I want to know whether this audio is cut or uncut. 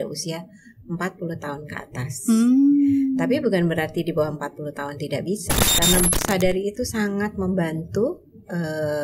cut